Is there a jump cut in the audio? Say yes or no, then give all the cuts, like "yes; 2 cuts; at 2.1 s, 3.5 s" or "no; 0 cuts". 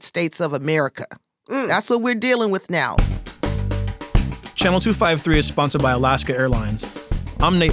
yes; 1 cut; at 2.9 s